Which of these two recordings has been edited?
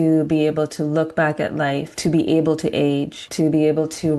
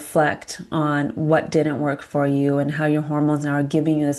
first; 2 cuts; at 1.9 s, 3.2 s

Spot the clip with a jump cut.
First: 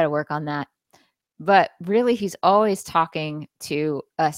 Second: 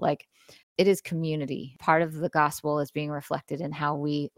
second; 1 cut; at 1.7 s

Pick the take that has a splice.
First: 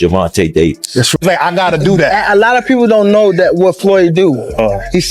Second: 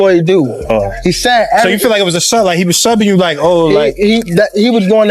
first; 1 cut; at 1.1 s

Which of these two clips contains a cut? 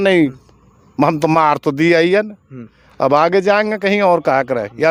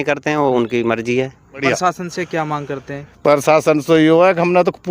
second; 1 cut; at 1.6 s

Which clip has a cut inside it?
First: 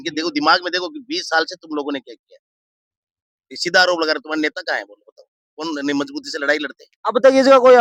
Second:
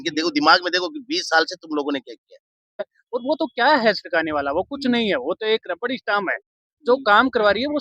second; 1 cut; at 3.0 s

